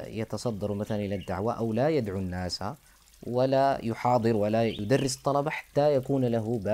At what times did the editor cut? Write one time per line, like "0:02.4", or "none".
0:04.8